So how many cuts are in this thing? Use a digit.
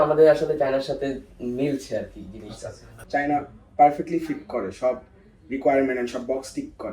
1